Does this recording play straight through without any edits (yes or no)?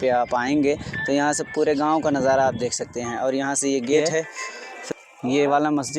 yes